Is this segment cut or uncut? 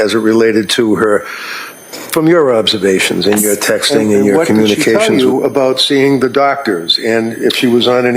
cut